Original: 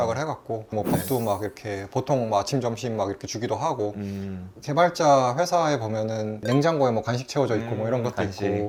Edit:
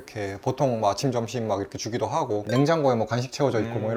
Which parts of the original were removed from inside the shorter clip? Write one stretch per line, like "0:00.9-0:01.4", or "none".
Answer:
0:03.9-0:06.4